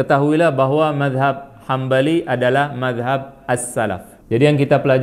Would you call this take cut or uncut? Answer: cut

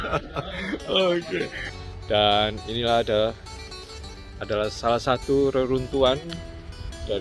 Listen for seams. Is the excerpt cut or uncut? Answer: cut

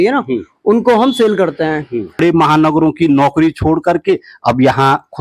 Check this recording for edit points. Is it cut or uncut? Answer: cut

